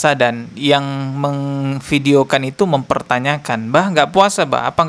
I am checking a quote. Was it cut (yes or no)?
no